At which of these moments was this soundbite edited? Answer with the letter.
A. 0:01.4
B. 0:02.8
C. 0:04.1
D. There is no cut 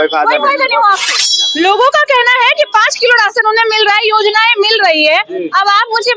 A